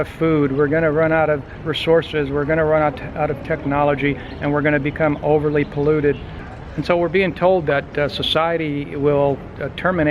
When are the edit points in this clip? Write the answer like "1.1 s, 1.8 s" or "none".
6.4 s